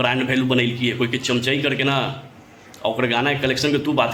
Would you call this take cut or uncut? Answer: uncut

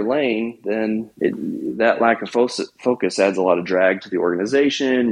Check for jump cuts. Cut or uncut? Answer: cut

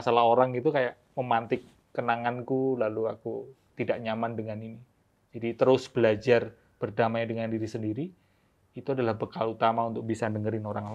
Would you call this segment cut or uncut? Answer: uncut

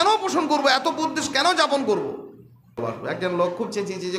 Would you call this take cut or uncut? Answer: cut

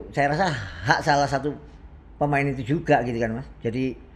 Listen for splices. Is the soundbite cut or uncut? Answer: uncut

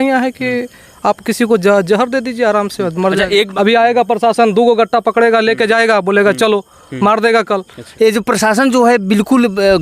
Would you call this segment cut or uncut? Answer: cut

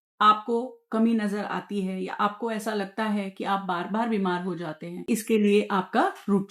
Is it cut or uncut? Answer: uncut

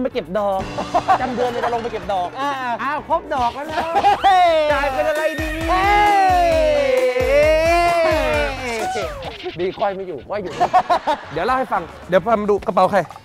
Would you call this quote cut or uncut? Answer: uncut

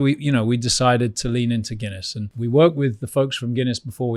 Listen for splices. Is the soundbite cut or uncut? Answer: cut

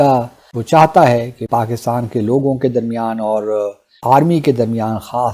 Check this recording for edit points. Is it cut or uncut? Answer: cut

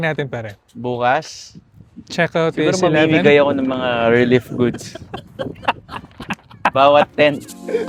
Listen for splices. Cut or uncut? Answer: uncut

